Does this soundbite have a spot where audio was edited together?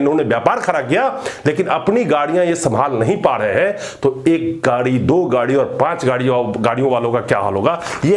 no; 0 cuts

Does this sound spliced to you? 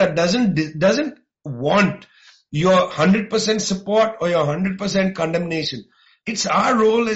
no; 0 cuts

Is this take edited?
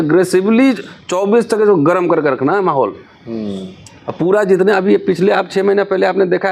no; 0 cuts

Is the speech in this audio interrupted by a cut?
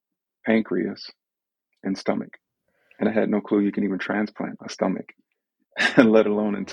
yes; 1 cut; at 2.6 s

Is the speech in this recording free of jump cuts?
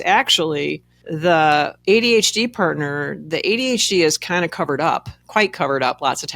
no; 1 cut; at 1.7 s

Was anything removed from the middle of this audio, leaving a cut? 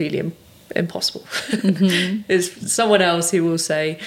no; 0 cuts

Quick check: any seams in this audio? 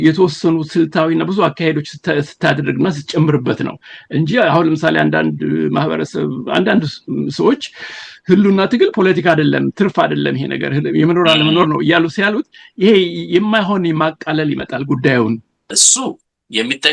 yes; 1 cut; at 15.6 s

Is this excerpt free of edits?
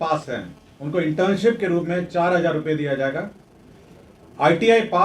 yes; 0 cuts

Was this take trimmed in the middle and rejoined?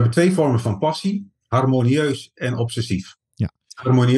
no; 0 cuts

